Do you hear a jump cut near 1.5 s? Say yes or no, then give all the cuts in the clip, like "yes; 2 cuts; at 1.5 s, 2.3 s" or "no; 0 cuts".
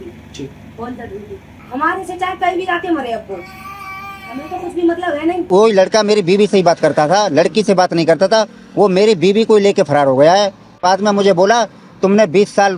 yes; 3 cuts; at 1.5 s, 5.4 s, 10.8 s